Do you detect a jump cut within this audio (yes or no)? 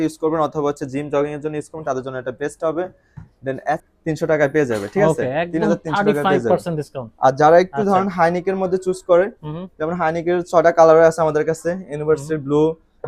yes